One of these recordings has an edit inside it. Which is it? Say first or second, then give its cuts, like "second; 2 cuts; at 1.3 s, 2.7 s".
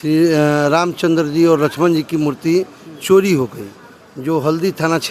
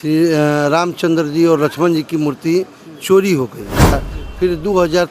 second; 1 cut; at 4.1 s